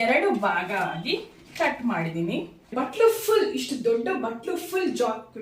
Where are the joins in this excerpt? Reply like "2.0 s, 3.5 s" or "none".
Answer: 2.7 s